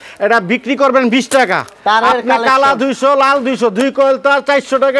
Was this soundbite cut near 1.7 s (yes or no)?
yes